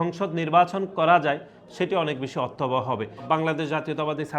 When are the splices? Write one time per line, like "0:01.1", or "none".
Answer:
0:03.2

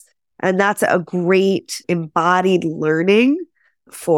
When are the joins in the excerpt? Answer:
none

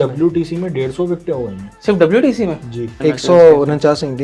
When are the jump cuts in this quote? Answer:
0:01.6
0:02.9

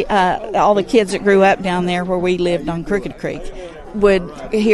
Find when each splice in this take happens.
0:03.8

